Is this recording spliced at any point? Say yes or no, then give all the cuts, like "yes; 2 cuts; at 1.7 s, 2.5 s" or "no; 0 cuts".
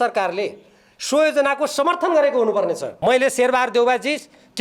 yes; 1 cut; at 2.9 s